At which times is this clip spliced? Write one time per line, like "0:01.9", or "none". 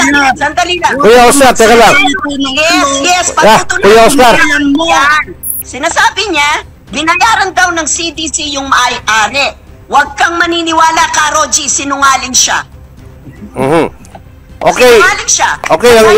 0:05.3